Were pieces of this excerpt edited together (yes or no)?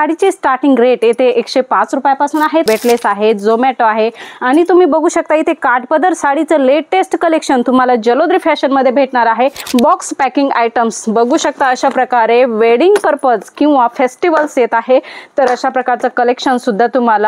yes